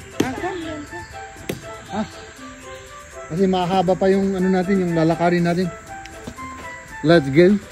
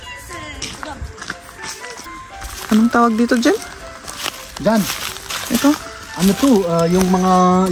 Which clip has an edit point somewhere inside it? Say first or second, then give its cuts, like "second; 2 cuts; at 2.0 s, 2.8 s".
second; 1 cut; at 2.0 s